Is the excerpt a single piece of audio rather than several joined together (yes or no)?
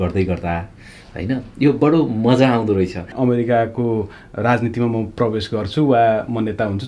no